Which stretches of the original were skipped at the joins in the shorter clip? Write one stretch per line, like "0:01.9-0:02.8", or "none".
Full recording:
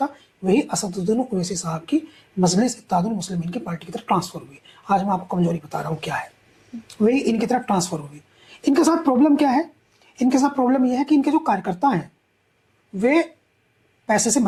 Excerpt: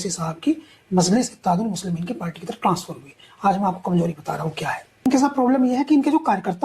0:06.5-0:10.3